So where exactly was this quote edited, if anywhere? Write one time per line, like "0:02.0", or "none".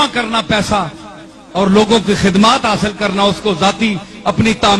none